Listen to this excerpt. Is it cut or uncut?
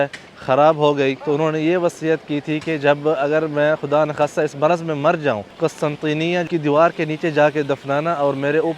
cut